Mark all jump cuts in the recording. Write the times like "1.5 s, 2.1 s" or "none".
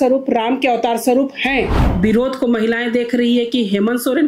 1.8 s